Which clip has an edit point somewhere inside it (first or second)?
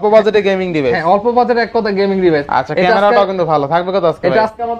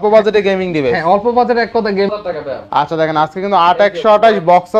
second